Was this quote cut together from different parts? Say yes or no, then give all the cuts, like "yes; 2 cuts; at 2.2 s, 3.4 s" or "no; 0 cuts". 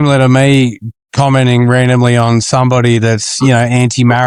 no; 0 cuts